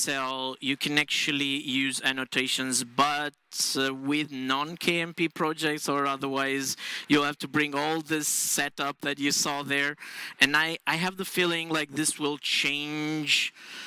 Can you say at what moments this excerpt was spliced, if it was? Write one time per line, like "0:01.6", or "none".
none